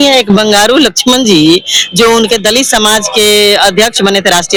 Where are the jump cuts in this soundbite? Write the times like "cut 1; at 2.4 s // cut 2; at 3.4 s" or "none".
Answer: none